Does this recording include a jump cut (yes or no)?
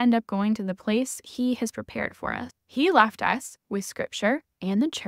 yes